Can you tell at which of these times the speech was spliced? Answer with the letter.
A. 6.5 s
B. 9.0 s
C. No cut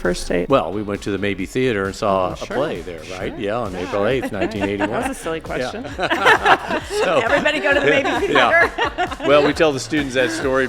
C